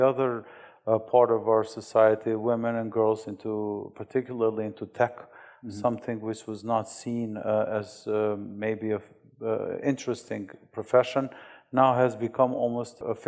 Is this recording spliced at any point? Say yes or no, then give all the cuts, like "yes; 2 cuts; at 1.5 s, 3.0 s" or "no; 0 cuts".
no; 0 cuts